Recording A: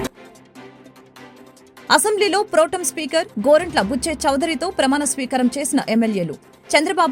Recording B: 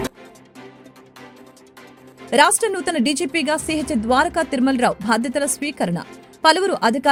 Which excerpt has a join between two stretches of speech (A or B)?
A